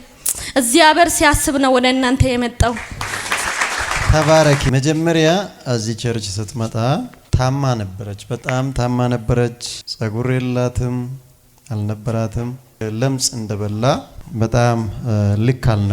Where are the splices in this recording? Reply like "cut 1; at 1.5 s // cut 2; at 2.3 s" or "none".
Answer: none